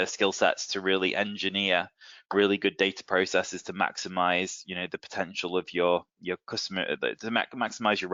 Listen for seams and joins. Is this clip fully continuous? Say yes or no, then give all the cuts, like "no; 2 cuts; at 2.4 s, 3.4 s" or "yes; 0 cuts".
yes; 0 cuts